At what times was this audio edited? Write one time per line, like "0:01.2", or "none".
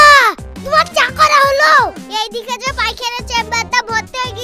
0:02.0

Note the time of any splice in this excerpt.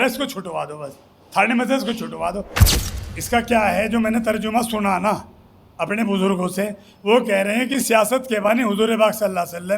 0:02.7

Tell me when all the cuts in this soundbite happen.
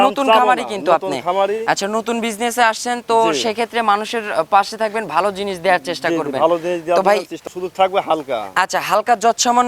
0:07.3

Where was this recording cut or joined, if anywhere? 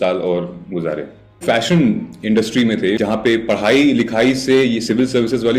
0:01.4
0:03.0

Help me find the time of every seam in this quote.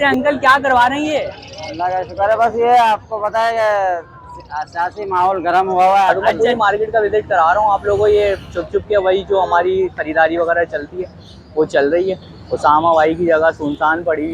0:06.1
0:12.3

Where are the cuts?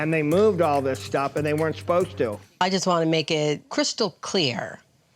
0:02.4
0:03.7

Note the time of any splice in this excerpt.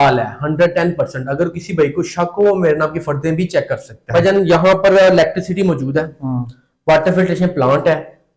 0:04.0

